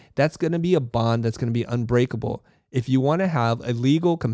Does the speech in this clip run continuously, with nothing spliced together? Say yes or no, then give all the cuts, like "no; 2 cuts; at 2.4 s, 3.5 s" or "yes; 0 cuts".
yes; 0 cuts